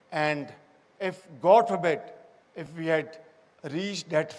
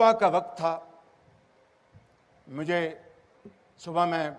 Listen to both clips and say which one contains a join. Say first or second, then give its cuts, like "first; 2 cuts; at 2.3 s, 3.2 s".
first; 1 cut; at 1.5 s